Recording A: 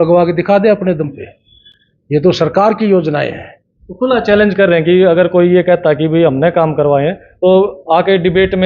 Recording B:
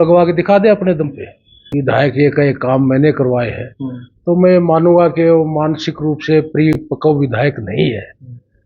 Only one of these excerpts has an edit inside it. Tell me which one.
B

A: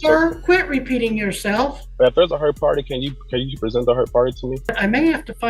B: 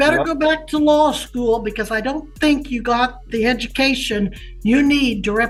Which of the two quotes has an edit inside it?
A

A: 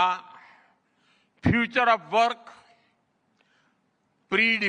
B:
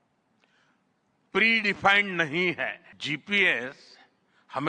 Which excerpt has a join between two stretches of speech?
B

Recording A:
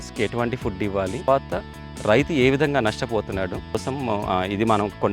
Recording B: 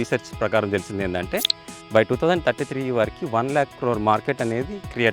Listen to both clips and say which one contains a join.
A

